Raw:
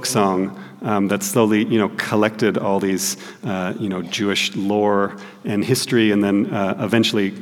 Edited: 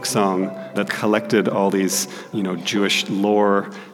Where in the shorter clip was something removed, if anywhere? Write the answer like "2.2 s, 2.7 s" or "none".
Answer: 0.8 s, 2.3 s